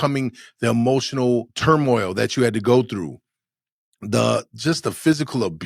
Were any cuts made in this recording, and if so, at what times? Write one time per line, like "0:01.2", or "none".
0:01.5
0:04.5